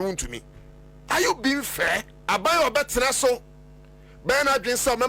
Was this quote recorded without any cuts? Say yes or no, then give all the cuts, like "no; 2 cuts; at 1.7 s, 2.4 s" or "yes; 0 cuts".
no; 1 cut; at 2.1 s